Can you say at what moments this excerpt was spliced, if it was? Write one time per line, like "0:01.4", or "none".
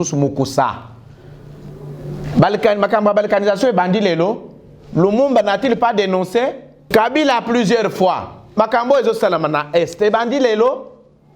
0:06.9

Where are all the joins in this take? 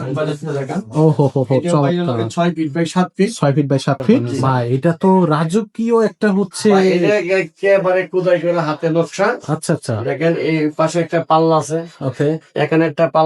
0:04.3

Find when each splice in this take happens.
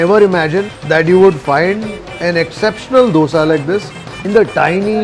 none

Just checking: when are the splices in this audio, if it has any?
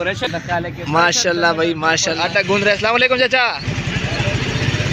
0:02.2

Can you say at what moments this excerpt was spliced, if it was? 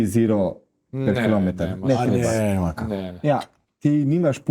0:03.6

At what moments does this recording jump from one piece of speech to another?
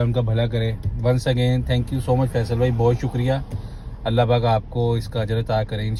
none

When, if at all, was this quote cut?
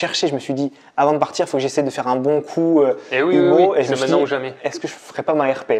none

